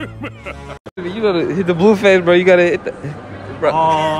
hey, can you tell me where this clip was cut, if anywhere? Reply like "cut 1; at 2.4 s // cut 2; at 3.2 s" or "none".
cut 1; at 1.0 s